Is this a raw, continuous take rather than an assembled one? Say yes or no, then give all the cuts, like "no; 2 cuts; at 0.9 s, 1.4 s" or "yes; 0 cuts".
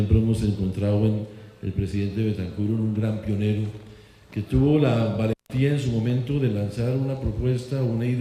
yes; 0 cuts